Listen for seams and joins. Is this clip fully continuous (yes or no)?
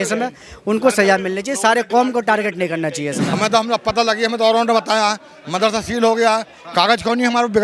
no